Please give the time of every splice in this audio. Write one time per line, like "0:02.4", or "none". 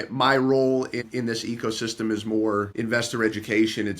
0:01.0
0:02.7